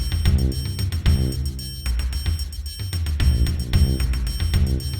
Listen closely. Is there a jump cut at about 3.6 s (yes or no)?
no